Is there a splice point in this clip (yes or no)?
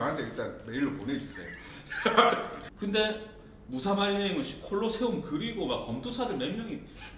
yes